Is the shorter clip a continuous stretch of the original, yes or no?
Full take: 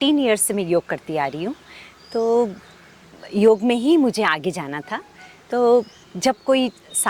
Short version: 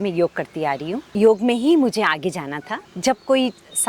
no